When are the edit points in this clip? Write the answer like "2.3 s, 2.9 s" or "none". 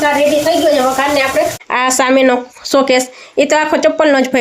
1.7 s